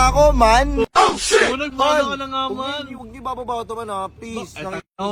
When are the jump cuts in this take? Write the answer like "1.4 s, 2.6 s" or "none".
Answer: none